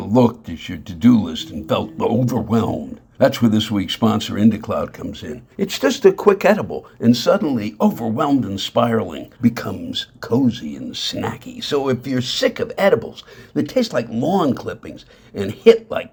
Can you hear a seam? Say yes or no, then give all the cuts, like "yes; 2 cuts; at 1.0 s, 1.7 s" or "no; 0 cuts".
no; 0 cuts